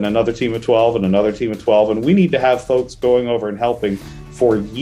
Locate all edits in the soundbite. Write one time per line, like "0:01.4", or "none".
none